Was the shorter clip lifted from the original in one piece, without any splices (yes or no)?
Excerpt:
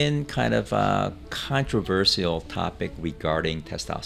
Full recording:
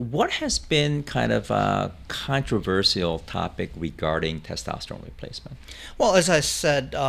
yes